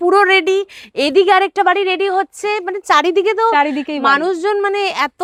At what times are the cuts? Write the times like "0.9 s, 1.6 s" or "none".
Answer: none